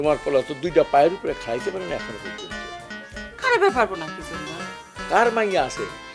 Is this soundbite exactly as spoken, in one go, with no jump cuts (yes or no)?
yes